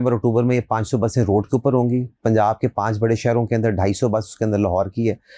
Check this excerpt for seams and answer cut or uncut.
uncut